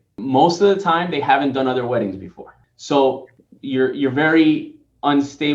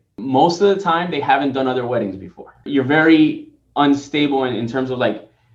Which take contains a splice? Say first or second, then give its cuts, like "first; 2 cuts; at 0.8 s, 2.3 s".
second; 1 cut; at 2.7 s